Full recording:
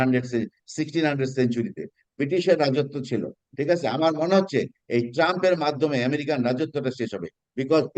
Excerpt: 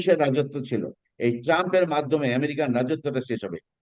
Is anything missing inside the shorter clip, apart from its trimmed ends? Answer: yes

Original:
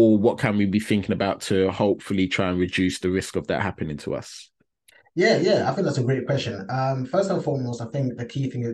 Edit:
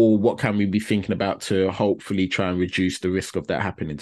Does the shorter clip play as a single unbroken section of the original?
yes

